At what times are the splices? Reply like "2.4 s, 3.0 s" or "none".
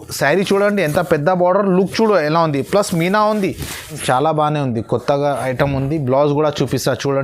4.0 s